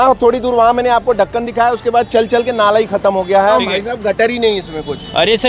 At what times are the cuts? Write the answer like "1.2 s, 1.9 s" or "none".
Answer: 3.6 s